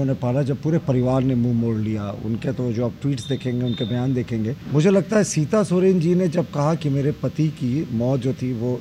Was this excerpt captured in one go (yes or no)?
no